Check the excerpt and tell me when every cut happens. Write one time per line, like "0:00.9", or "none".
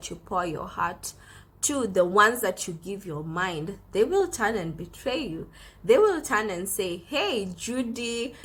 none